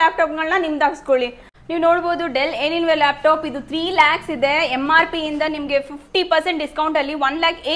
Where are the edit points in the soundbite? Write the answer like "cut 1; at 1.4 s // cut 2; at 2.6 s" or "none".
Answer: none